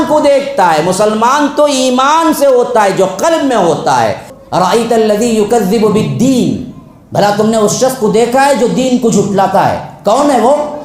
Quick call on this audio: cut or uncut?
cut